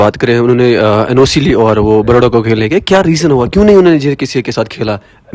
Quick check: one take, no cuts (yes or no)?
yes